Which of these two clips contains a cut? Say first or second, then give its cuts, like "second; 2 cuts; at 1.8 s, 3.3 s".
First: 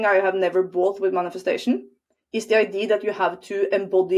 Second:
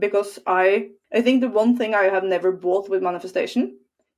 second; 1 cut; at 1.0 s